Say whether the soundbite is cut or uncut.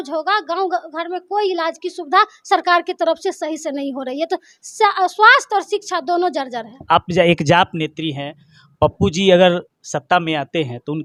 uncut